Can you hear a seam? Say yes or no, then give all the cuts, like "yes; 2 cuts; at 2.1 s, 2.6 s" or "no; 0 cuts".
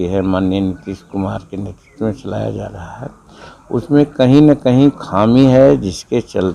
no; 0 cuts